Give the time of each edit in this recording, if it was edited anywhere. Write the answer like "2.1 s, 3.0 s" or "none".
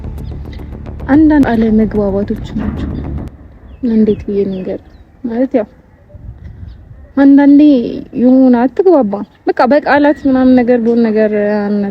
1.4 s